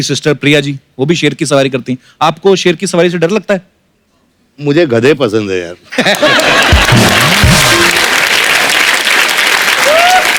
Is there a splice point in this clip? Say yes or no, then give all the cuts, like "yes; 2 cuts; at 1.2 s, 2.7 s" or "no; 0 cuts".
no; 0 cuts